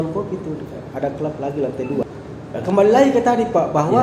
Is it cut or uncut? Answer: cut